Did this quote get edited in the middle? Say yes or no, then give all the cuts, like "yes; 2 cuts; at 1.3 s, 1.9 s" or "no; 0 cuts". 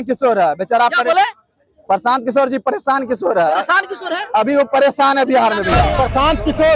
yes; 1 cut; at 5.8 s